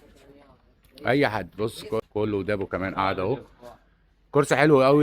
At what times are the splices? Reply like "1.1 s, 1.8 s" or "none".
2.0 s